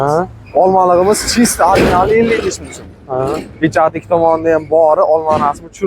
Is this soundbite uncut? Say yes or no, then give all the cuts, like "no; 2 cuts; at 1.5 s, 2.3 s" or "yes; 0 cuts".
yes; 0 cuts